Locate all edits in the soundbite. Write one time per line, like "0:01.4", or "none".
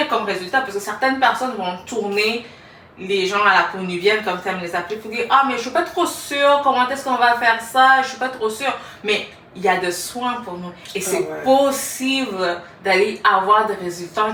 none